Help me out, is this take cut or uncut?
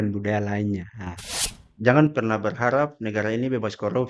cut